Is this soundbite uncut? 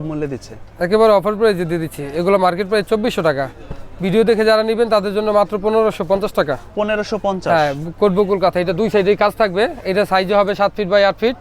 yes; 0 cuts

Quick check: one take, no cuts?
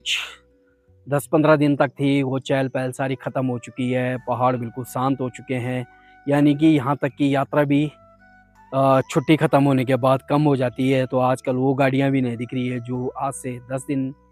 yes; 0 cuts

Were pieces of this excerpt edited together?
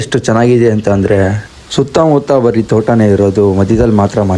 no; 0 cuts

